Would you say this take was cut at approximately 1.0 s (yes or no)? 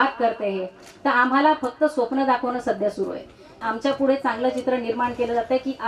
no